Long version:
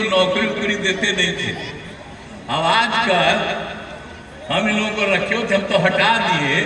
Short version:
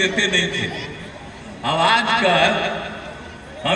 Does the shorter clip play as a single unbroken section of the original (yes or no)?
yes